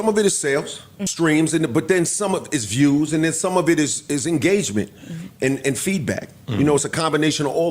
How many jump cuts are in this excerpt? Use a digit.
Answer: 1